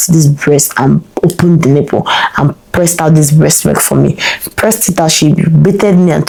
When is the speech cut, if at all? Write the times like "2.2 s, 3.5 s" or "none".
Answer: none